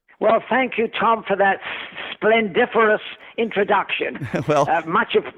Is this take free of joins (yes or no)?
yes